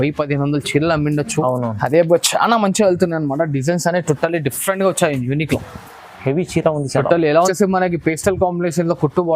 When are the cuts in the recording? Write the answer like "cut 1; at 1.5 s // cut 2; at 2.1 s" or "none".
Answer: cut 1; at 7.5 s